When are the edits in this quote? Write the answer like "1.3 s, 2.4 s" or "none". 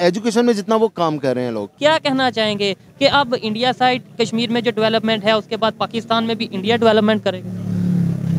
1.6 s